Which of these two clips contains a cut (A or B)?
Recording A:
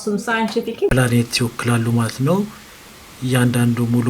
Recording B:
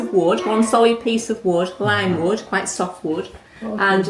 A